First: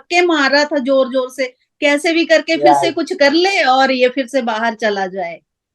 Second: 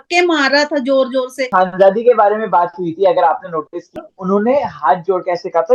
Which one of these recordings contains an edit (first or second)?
second